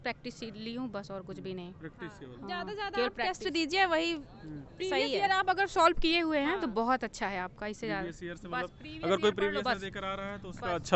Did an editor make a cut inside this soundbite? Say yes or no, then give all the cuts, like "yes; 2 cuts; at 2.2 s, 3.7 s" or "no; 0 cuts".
no; 0 cuts